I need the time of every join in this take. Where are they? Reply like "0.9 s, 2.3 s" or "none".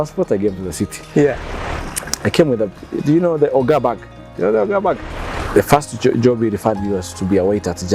1.4 s, 5.0 s